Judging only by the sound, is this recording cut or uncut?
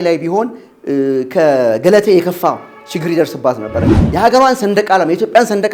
cut